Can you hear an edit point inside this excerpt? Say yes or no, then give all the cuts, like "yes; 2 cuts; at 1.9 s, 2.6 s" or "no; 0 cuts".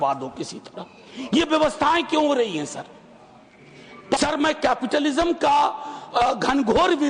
yes; 1 cut; at 4.2 s